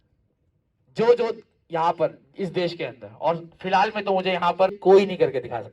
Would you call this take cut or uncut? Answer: cut